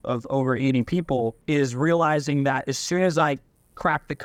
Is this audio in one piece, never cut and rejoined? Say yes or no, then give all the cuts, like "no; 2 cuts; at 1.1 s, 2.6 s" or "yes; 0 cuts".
yes; 0 cuts